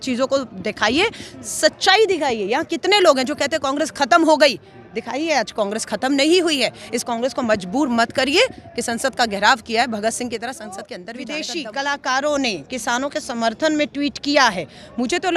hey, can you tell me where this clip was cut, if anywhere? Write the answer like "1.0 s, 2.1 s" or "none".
11.1 s